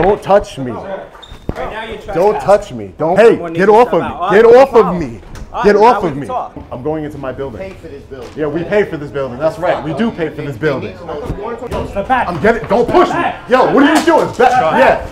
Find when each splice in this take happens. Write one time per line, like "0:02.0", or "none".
0:03.1
0:06.6
0:11.7